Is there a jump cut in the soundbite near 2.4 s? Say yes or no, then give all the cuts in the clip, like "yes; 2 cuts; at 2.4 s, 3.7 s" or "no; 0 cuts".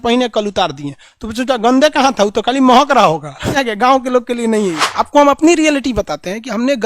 no; 2 cuts; at 3.6 s, 4.8 s